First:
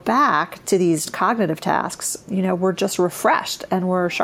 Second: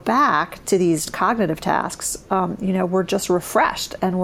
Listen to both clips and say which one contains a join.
first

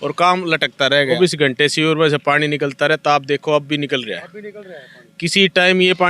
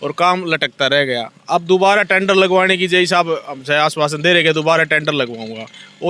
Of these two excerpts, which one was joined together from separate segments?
first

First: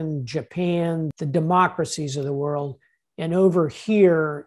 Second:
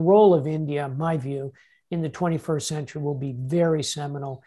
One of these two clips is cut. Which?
first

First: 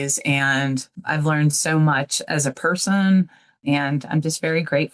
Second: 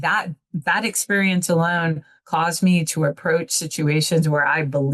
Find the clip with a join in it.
first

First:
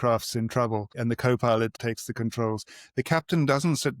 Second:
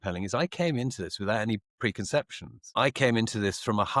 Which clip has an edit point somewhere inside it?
first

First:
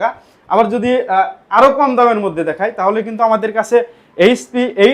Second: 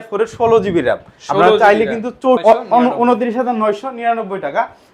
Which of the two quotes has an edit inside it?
second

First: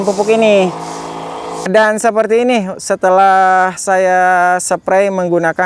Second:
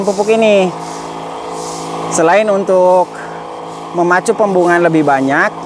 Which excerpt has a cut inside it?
first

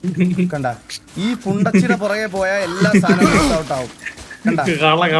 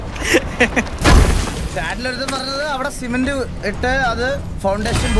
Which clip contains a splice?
second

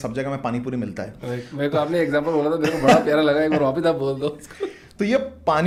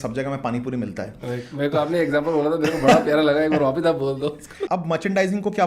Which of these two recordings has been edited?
second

